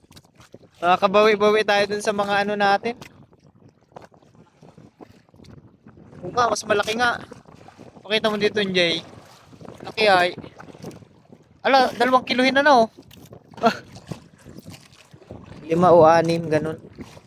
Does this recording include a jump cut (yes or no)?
yes